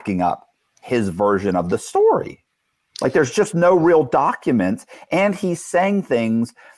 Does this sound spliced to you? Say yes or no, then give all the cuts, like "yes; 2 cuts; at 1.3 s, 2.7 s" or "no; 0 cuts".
no; 0 cuts